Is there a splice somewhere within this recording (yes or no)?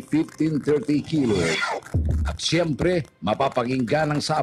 no